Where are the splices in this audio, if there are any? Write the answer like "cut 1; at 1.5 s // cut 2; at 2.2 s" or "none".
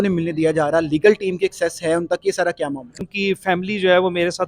cut 1; at 3.0 s